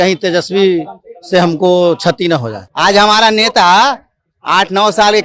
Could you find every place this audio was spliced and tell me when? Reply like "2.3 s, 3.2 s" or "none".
2.6 s